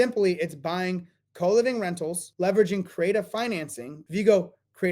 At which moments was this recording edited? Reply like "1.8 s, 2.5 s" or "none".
2.2 s, 3.9 s